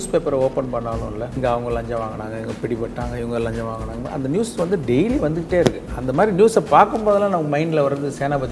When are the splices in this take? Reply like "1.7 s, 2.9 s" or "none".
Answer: 1.4 s